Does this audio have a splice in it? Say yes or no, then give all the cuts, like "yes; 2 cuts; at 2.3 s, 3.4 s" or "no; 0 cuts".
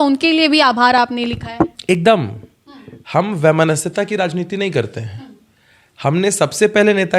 no; 0 cuts